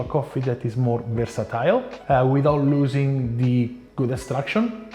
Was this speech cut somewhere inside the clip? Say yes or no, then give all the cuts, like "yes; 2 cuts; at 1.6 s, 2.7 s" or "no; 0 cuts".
yes; 2 cuts; at 1.9 s, 3.8 s